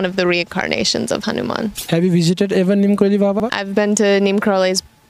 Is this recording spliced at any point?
yes; 2 cuts; at 1.8 s, 3.5 s

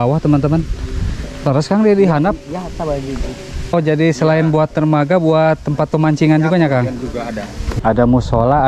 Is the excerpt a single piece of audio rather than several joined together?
no; 2 cuts; at 3.7 s, 7.6 s

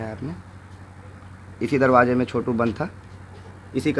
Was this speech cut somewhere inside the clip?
no; 0 cuts

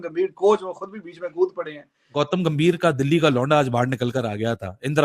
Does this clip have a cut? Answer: yes; 1 cut; at 2.1 s

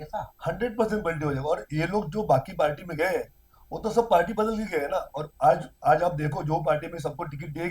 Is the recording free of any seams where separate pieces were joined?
yes; 0 cuts

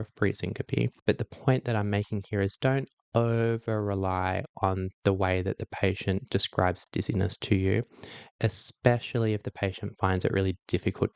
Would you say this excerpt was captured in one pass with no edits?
no; 1 cut; at 0.9 s

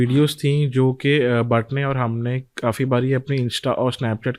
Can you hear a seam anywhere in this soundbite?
no; 0 cuts

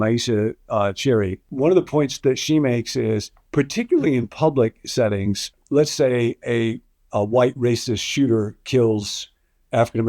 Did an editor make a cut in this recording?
yes; 2 cuts; at 1.4 s, 5.5 s

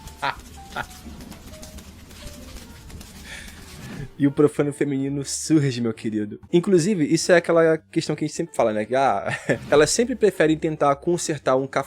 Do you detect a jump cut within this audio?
yes; 1 cut; at 6.5 s

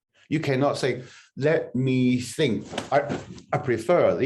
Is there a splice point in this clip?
yes; 1 cut; at 2.9 s

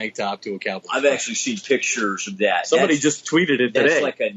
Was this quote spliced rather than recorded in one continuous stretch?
no; 0 cuts

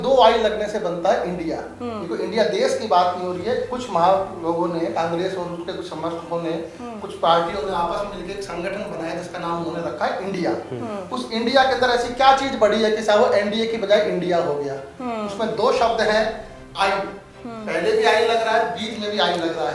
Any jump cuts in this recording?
no; 0 cuts

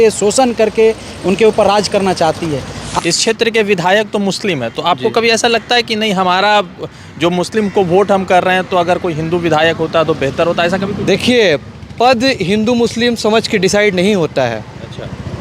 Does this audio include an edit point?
yes; 1 cut; at 2.9 s

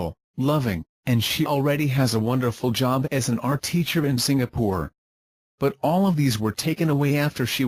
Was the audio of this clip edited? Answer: yes; 2 cuts; at 3.0 s, 6.9 s

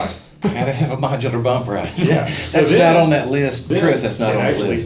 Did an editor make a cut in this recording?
yes; 1 cut; at 3.7 s

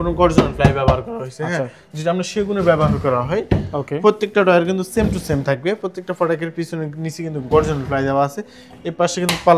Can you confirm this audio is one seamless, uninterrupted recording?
yes; 0 cuts

